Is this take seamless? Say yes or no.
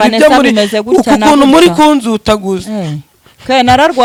yes